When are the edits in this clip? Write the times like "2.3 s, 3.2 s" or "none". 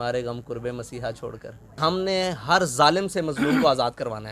1.8 s